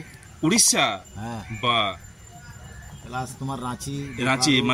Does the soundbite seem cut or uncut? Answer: uncut